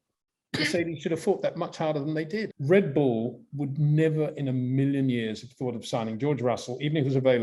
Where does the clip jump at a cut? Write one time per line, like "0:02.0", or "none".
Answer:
0:02.5